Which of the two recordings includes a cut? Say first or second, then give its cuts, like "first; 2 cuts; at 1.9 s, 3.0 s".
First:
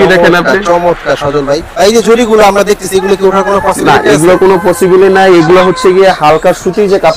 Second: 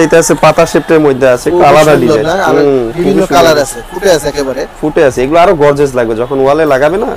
first; 1 cut; at 1.7 s